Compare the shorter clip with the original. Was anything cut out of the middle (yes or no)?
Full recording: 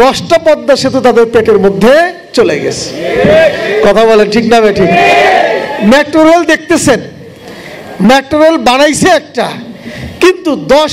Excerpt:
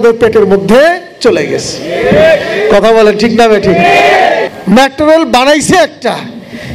yes